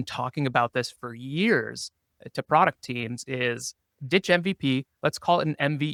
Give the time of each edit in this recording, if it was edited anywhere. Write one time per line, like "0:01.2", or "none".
none